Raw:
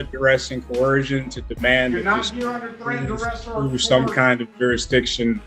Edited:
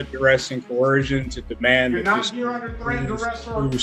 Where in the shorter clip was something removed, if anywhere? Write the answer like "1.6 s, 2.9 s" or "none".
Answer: none